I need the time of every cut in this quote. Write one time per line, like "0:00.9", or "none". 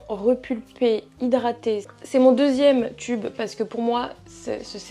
0:01.8